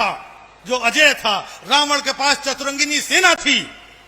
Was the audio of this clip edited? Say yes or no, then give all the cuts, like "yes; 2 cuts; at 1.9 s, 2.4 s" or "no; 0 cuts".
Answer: no; 0 cuts